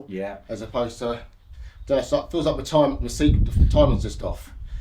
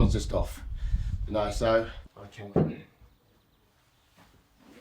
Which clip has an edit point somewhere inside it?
second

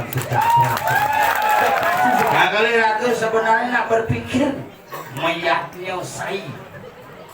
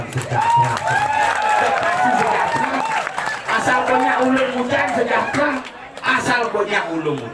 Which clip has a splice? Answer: first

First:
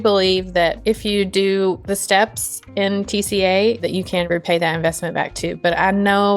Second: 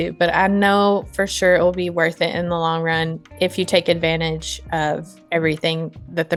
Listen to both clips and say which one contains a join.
first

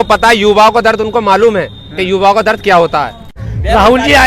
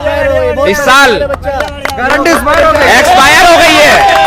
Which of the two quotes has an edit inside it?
first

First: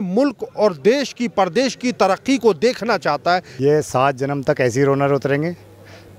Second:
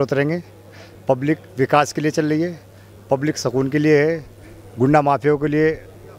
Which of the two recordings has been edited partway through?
first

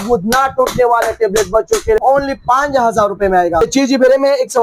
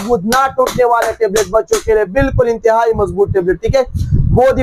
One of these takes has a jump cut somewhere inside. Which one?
first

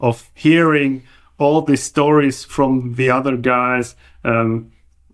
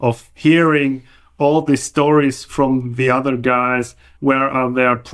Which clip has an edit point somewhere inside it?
second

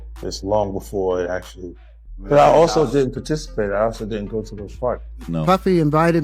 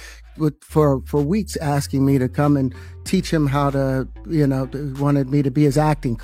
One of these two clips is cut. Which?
first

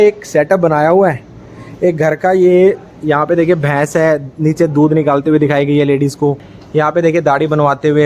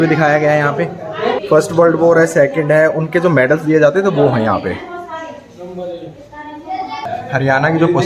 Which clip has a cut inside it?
second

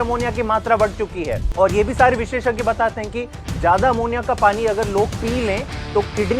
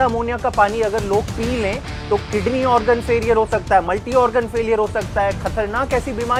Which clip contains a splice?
first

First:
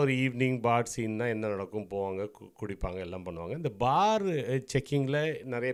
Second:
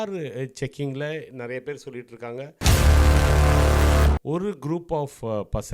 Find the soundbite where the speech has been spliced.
second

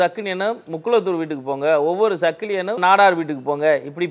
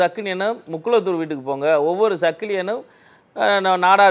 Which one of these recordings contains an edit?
first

